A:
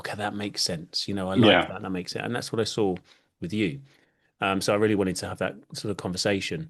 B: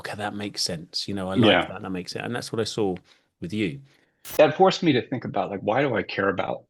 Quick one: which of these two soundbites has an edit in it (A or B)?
B